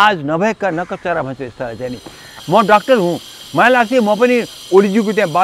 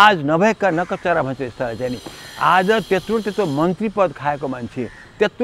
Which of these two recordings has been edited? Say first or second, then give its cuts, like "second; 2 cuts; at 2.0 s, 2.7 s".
first; 1 cut; at 2.3 s